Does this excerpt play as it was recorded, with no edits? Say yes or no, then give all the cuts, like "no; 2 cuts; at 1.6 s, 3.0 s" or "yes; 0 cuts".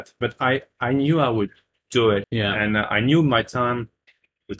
no; 1 cut; at 2.3 s